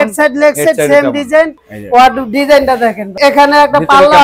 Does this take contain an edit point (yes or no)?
yes